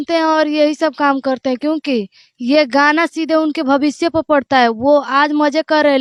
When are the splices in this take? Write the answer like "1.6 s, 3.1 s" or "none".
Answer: none